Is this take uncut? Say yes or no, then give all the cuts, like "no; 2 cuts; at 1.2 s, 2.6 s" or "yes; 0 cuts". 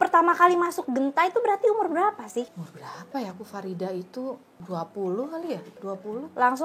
no; 2 cuts; at 2.7 s, 4.5 s